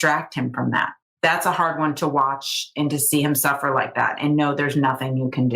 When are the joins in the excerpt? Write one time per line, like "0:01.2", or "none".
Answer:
0:01.2